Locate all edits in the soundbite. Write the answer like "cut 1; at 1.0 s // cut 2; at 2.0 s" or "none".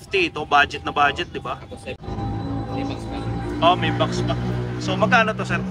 cut 1; at 2.0 s